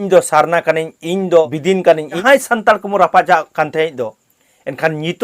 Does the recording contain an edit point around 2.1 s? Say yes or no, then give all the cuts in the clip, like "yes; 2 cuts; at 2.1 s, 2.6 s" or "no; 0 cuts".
yes; 1 cut; at 2.1 s